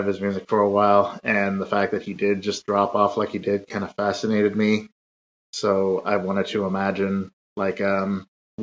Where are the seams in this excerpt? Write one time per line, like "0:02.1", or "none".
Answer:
none

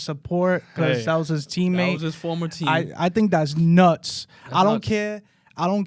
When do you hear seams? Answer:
none

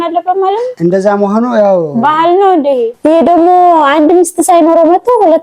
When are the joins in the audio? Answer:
0:02.9

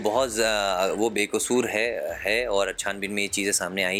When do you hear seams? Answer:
none

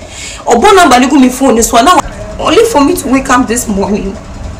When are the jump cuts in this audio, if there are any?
0:02.0

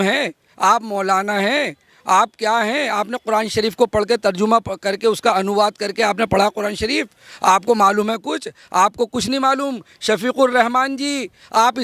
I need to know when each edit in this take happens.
none

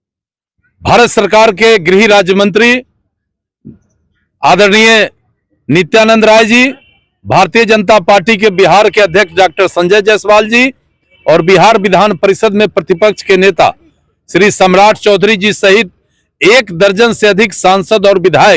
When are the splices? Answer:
none

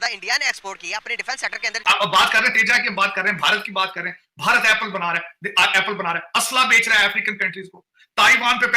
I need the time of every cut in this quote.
0:01.8

